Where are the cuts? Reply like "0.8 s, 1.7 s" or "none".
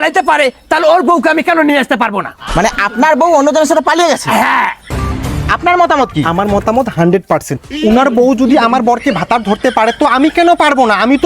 4.8 s